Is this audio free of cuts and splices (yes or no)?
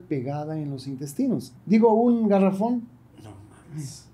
no